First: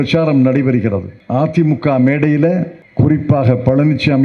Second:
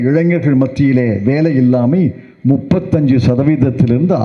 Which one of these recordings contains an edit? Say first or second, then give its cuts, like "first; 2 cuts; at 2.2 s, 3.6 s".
first; 2 cuts; at 1.1 s, 2.8 s